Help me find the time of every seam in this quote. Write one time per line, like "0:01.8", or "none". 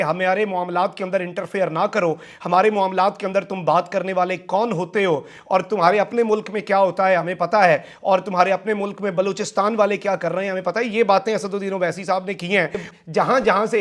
none